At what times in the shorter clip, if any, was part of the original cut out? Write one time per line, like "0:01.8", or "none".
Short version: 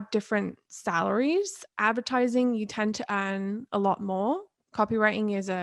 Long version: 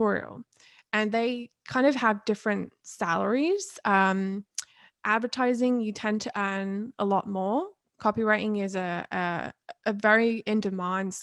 0:01.6